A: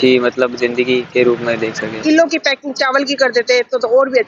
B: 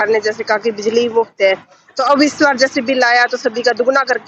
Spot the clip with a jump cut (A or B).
A